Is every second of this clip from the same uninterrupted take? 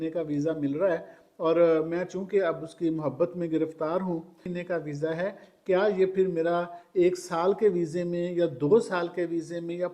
no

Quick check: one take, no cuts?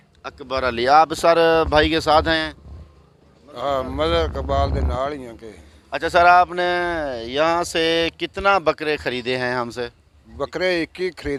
yes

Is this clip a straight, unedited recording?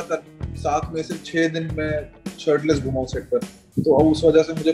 no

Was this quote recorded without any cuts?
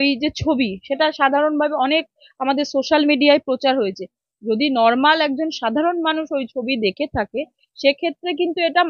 yes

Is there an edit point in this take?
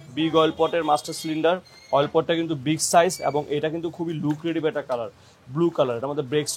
no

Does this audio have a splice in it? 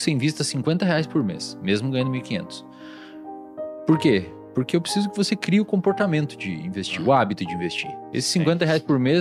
no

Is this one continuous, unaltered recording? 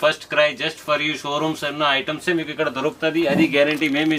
yes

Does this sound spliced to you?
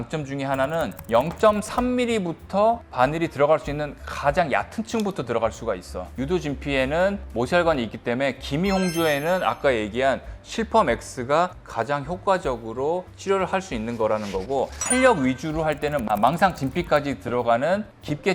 yes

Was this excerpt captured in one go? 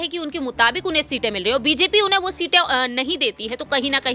yes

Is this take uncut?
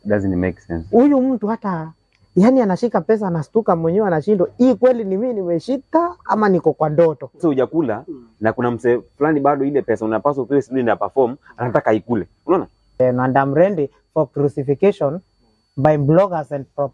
no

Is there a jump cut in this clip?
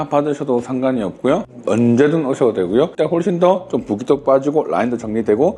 yes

